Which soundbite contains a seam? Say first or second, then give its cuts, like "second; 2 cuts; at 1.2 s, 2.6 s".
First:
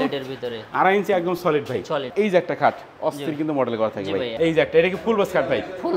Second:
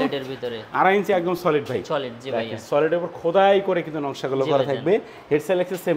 first; 2 cuts; at 2.1 s, 4.3 s